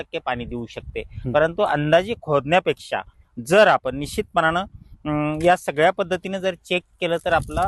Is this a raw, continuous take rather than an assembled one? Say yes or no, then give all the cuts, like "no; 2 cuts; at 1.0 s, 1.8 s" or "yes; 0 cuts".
yes; 0 cuts